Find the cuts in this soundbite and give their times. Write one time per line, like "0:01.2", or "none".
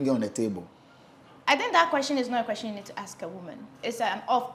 none